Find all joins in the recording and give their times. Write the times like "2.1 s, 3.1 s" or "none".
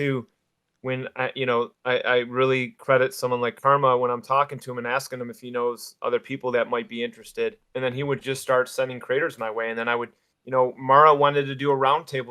7.6 s